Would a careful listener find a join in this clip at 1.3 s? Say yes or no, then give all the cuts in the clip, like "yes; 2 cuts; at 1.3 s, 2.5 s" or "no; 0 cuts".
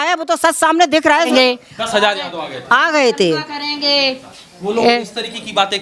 yes; 1 cut; at 1.3 s